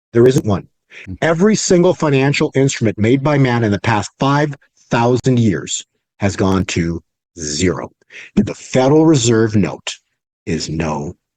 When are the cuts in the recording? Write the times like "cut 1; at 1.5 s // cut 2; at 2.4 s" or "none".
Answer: none